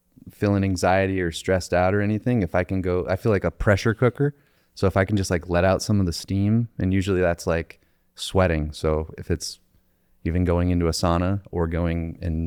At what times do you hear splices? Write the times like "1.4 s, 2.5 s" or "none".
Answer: none